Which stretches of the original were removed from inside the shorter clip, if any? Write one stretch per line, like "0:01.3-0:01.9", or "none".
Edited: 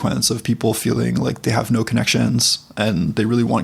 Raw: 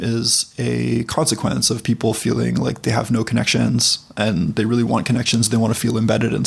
none

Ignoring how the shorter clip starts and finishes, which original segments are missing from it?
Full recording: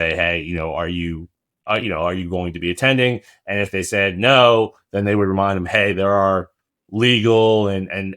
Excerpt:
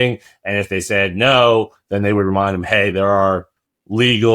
none

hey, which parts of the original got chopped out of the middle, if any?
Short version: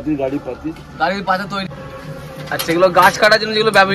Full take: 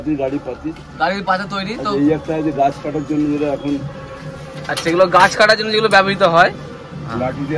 0:01.7-0:03.9

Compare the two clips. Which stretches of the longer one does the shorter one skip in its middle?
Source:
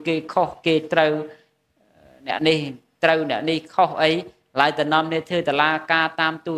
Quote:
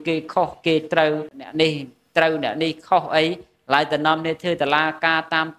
0:01.4-0:02.3

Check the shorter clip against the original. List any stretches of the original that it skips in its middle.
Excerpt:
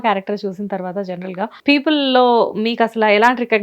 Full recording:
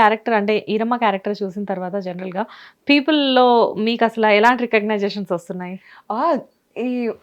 0:02.5-0:02.8

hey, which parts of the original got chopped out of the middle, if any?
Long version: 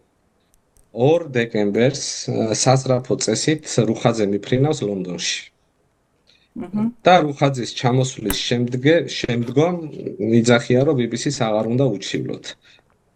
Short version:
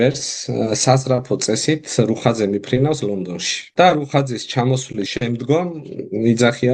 0:05.5-0:07.0
0:08.4-0:09.2

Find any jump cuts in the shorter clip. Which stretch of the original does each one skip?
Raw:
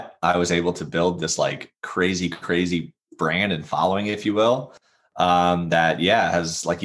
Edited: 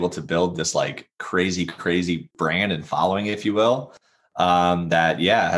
0:02.9-0:03.1

